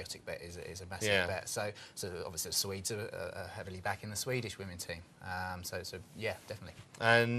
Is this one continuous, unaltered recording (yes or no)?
no